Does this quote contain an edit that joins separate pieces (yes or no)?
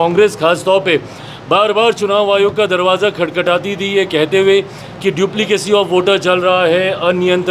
no